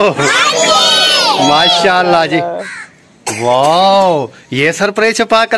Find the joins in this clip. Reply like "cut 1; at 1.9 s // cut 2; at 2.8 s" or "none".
none